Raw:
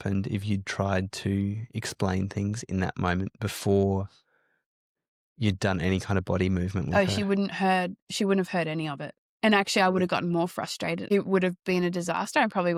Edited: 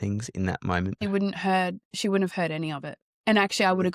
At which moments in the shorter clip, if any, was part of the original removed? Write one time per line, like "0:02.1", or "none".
0:01.0

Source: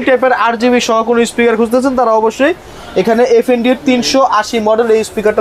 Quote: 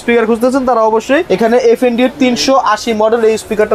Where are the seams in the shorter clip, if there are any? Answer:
0:01.2

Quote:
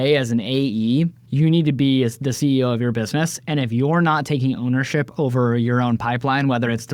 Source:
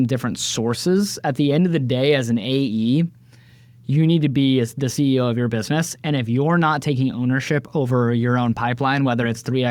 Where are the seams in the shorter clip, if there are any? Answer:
0:01.2

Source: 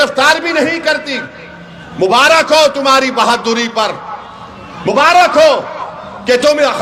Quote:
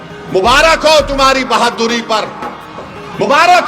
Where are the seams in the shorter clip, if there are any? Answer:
none

